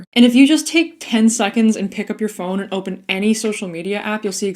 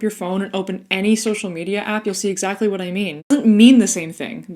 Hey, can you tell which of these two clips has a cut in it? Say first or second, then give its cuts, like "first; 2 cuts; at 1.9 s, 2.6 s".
second; 1 cut; at 3.3 s